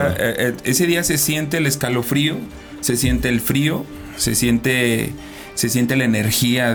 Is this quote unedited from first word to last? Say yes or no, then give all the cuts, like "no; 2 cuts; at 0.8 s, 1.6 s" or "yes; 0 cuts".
yes; 0 cuts